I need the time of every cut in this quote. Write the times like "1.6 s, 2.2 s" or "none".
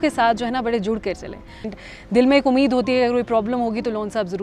1.7 s